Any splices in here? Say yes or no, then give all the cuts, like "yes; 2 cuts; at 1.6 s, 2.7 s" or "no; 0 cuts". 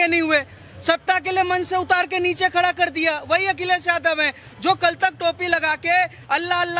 no; 0 cuts